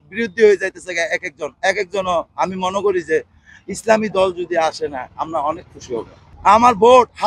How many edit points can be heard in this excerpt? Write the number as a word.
one